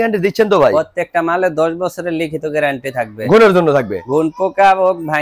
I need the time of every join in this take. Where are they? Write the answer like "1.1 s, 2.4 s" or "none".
none